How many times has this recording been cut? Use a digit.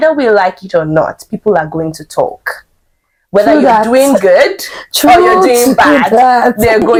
0